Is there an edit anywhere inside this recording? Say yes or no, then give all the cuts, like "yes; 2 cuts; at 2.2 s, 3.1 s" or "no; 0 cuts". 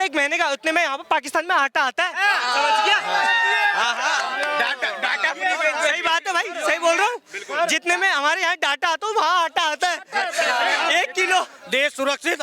no; 0 cuts